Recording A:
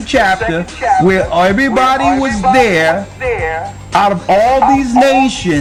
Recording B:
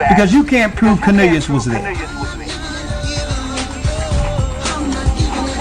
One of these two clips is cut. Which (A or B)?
B